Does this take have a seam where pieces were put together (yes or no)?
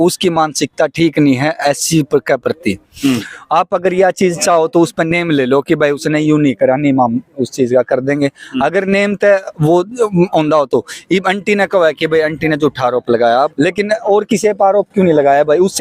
no